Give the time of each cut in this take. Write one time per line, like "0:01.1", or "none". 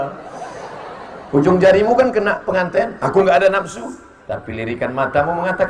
none

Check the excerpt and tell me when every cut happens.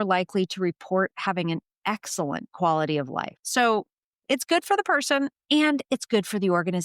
0:03.4

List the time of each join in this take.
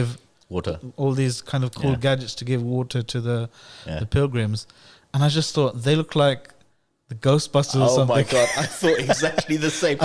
none

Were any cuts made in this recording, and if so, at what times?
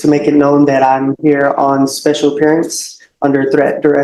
none

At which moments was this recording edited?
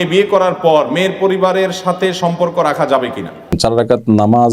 0:03.6

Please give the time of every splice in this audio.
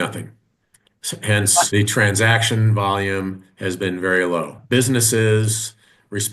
0:01.7
0:04.6

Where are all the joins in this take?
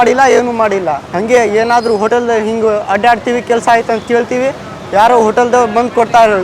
0:01.1

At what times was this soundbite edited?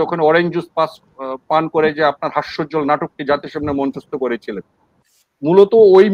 none

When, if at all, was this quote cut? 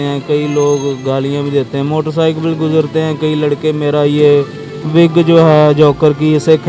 none

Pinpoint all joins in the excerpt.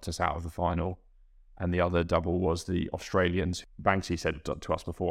0:03.6

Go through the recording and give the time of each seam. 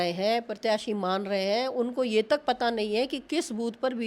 none

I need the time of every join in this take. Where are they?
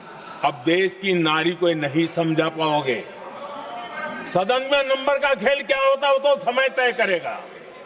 none

